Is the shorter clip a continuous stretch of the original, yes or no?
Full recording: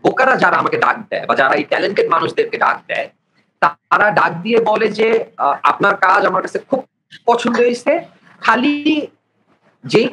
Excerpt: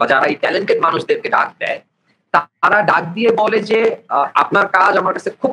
yes